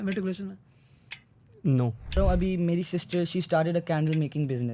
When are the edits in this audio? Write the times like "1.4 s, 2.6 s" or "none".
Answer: 2.2 s